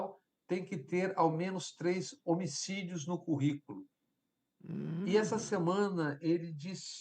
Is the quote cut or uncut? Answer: uncut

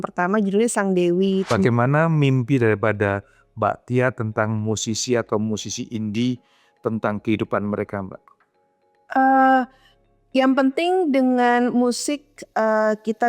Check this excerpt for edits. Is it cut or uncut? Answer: cut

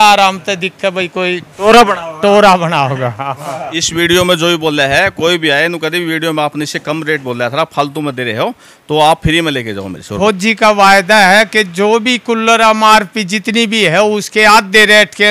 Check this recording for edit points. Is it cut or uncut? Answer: cut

